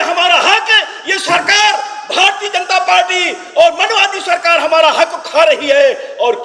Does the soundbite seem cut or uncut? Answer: uncut